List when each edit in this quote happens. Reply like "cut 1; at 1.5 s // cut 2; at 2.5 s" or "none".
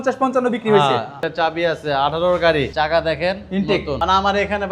cut 1; at 1.2 s // cut 2; at 2.7 s // cut 3; at 4.0 s